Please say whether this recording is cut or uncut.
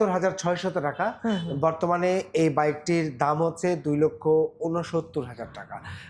uncut